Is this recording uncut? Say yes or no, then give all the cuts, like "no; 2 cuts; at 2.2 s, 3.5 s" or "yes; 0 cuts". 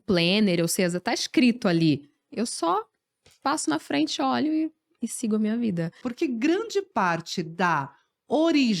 no; 1 cut; at 6.0 s